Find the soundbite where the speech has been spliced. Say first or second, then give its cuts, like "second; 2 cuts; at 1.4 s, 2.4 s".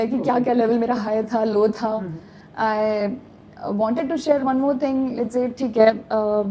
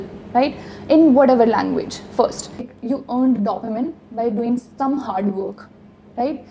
second; 1 cut; at 2.7 s